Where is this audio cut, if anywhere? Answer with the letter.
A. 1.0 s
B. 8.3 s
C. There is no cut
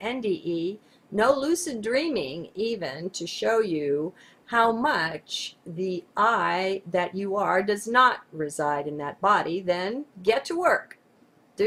C